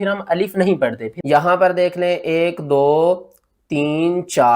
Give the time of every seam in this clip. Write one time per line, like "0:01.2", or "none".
0:01.1